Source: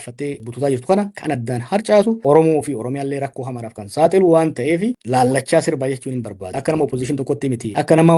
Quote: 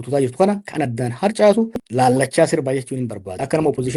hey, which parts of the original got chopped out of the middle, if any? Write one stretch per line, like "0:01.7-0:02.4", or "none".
0:02.2-0:04.9